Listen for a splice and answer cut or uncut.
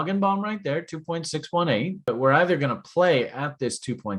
cut